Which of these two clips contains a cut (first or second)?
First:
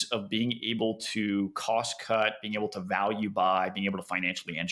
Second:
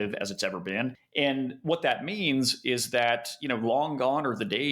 second